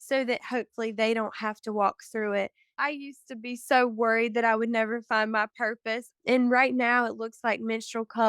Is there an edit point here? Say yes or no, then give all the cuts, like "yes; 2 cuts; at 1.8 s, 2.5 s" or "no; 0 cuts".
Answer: yes; 2 cuts; at 2.8 s, 6.1 s